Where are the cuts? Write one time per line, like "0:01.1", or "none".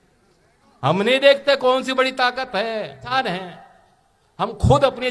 0:03.1